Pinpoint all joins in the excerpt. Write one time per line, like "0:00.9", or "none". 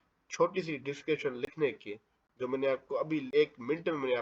0:03.3